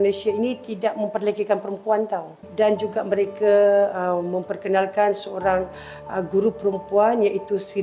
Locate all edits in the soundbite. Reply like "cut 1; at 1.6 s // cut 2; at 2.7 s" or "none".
cut 1; at 2.4 s